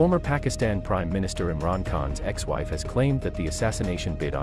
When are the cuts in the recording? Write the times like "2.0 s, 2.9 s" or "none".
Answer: none

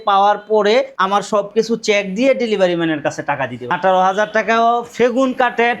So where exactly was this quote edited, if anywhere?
1.0 s, 3.7 s

